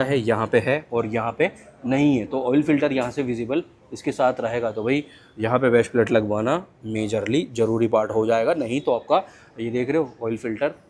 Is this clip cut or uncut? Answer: uncut